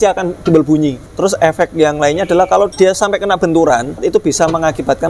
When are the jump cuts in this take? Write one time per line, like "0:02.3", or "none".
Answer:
0:01.1
0:04.0